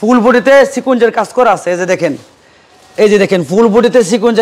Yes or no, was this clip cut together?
no